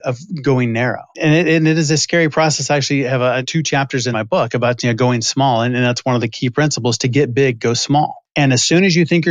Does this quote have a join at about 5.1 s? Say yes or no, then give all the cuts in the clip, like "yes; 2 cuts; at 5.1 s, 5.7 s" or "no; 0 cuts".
no; 3 cuts; at 1.2 s, 3.9 s, 8.2 s